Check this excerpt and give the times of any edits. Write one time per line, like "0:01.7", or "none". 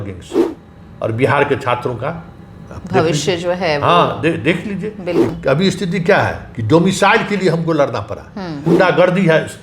0:05.3
0:08.6